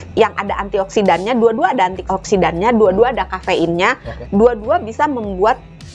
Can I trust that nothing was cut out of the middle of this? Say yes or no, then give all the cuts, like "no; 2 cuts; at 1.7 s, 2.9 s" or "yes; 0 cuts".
yes; 0 cuts